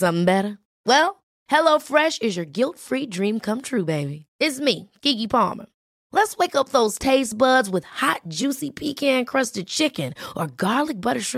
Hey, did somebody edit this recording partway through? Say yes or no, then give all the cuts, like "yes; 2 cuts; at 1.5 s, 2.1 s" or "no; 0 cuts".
no; 0 cuts